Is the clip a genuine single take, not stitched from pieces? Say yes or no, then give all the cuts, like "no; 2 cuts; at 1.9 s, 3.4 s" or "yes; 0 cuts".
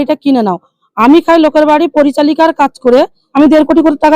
no; 1 cut; at 3.2 s